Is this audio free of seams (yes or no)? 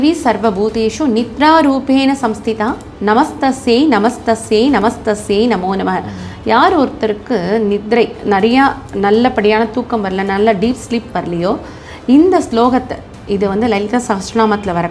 yes